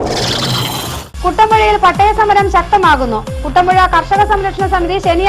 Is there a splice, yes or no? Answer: yes